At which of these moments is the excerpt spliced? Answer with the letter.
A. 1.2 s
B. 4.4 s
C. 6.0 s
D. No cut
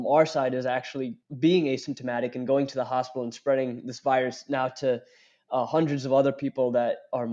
A